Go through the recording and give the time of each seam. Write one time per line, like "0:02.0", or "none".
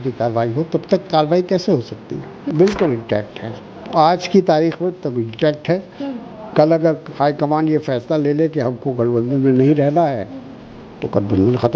0:02.4